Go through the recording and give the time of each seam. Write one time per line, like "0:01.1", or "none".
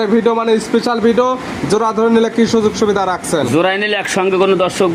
none